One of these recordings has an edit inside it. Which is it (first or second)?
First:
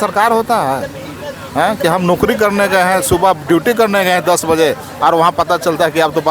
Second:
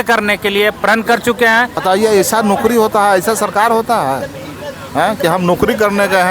second